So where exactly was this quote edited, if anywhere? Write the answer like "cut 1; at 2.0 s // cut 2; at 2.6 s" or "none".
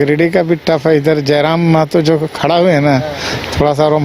none